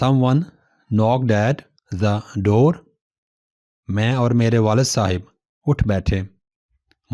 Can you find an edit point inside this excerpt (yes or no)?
no